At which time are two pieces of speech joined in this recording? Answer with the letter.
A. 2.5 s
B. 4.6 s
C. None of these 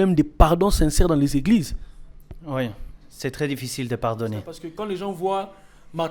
B